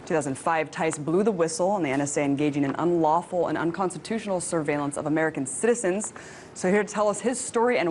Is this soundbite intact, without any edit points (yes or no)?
no